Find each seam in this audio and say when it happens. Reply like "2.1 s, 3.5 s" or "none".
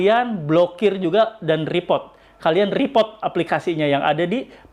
none